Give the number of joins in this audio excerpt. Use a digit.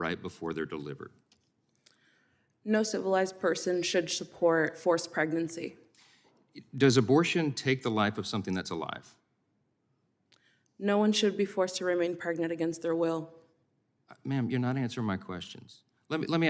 0